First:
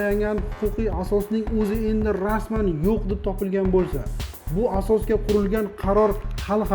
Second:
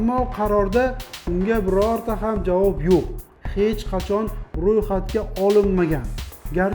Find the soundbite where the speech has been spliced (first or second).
second